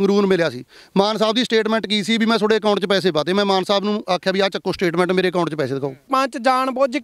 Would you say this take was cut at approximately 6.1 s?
yes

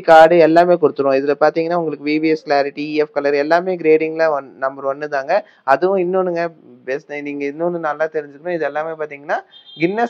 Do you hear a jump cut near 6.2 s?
no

